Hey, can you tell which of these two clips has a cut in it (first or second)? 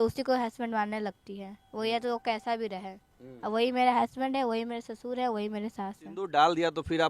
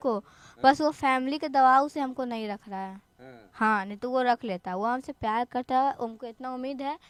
first